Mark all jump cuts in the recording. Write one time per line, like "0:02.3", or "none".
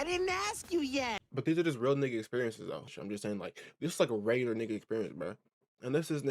0:02.8